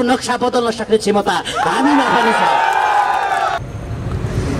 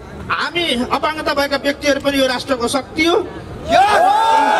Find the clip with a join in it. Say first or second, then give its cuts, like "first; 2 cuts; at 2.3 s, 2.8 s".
first; 1 cut; at 3.6 s